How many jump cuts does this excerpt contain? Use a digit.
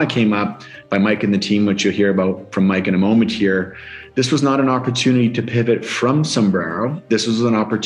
0